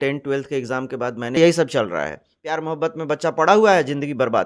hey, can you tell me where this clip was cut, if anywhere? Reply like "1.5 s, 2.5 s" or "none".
1.4 s